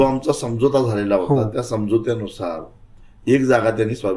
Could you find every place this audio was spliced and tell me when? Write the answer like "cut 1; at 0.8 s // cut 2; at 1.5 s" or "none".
none